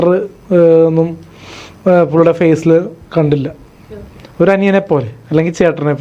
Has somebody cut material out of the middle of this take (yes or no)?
no